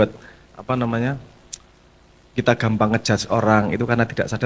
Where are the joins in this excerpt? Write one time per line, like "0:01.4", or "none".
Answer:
none